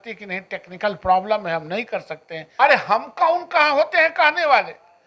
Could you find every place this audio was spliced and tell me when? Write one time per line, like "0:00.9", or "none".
0:02.4